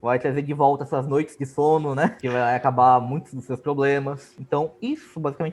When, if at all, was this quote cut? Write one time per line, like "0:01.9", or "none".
0:02.2
0:04.6